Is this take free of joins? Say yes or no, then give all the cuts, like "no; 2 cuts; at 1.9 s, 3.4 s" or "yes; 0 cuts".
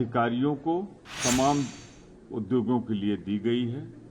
no; 1 cut; at 1.0 s